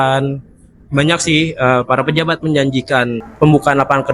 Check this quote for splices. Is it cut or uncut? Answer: cut